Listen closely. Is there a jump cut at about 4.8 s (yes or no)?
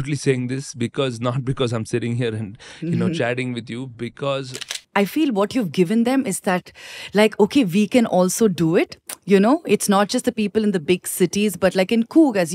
yes